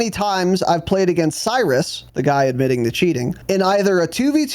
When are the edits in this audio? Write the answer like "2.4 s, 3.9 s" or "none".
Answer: 2.0 s, 3.3 s